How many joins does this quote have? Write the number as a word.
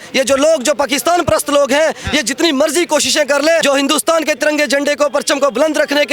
one